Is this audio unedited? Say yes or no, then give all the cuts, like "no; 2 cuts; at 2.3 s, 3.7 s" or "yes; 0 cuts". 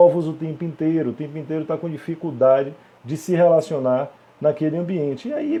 yes; 0 cuts